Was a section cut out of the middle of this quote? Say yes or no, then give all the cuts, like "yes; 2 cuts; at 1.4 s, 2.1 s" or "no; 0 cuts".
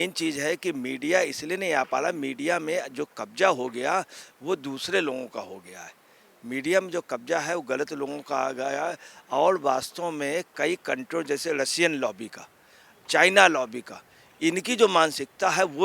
no; 0 cuts